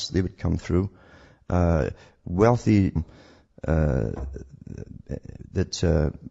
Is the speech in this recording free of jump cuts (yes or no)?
yes